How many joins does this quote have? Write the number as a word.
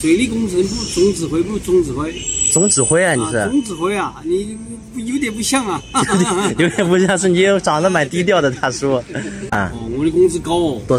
one